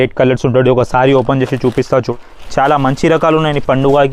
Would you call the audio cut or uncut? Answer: cut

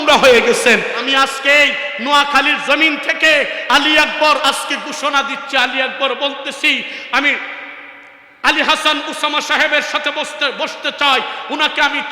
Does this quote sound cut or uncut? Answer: cut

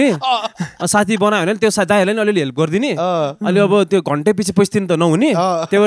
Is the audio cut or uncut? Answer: uncut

